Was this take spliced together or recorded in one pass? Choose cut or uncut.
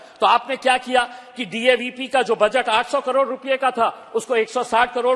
uncut